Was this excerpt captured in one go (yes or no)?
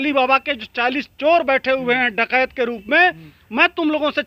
yes